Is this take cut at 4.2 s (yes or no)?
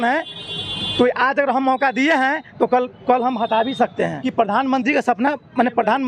yes